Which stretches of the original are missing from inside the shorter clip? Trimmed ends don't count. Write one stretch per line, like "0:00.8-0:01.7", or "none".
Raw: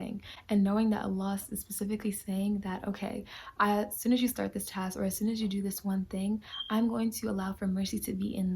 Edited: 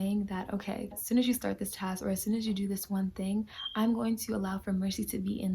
0:03.3-0:03.9